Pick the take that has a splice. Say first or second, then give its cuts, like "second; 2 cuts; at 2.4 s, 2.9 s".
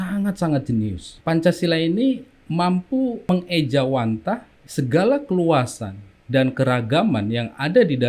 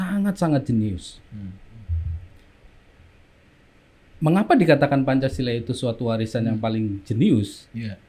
first; 4 cuts; at 1.1 s, 2.3 s, 3.3 s, 4.6 s